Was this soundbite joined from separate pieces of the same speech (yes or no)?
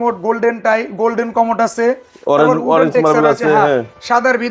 no